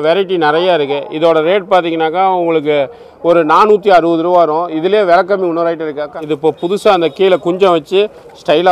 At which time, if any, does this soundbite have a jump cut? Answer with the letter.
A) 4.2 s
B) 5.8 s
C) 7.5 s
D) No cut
B